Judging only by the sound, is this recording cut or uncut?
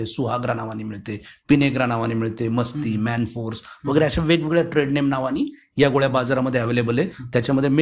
uncut